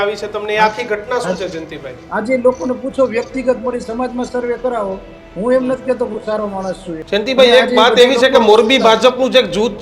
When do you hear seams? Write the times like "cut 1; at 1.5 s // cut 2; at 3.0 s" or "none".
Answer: cut 1; at 2.0 s // cut 2; at 6.9 s